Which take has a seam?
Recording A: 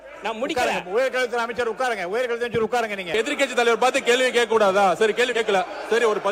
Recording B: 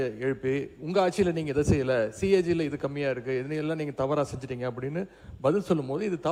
A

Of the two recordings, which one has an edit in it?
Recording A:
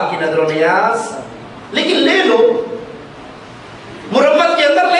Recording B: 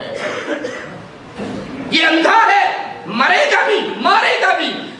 B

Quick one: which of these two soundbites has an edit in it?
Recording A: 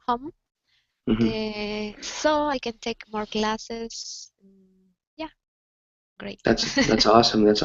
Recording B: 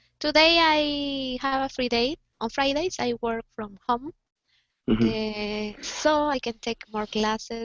B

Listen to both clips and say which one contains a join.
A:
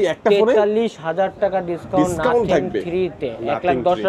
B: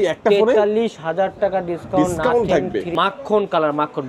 B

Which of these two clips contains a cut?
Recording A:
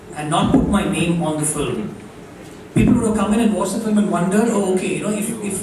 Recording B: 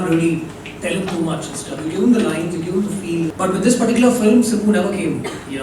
B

